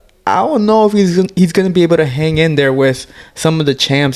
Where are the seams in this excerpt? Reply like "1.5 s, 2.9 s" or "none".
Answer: none